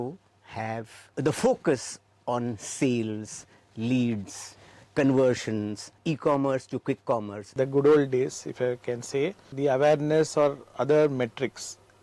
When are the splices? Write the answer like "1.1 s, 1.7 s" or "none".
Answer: 1.1 s, 7.5 s, 9.5 s